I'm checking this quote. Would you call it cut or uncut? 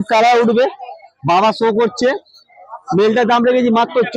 uncut